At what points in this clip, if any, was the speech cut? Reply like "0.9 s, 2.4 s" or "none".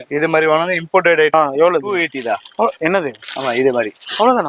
1.3 s